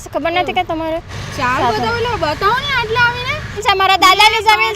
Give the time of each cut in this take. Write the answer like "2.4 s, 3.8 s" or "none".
1.2 s, 3.6 s